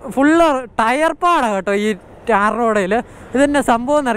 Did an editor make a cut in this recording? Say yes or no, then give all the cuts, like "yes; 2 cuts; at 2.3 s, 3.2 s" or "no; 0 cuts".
no; 0 cuts